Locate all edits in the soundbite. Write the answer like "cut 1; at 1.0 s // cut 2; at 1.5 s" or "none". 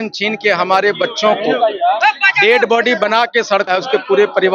none